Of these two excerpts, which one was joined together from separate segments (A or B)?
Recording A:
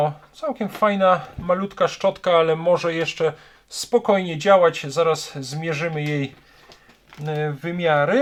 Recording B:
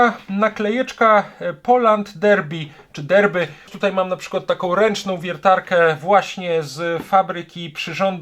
B